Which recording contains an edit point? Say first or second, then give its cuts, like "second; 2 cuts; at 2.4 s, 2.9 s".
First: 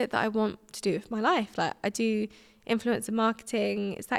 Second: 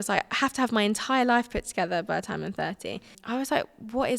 second; 1 cut; at 3.1 s